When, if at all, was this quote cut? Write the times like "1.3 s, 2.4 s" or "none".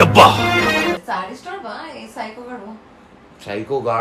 1.0 s